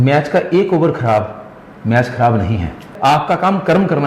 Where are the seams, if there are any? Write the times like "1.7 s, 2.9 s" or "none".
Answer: 2.9 s